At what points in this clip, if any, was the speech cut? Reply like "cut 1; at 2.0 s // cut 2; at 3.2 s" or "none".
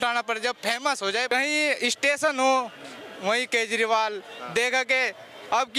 cut 1; at 1.3 s